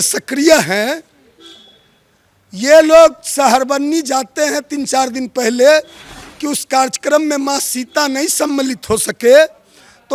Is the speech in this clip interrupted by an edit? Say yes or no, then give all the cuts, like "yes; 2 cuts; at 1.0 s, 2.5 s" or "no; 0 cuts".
no; 0 cuts